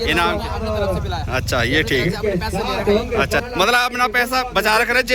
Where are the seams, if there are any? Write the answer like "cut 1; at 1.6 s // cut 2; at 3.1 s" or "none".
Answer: cut 1; at 3.4 s